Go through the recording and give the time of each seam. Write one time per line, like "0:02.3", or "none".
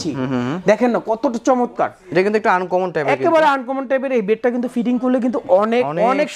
none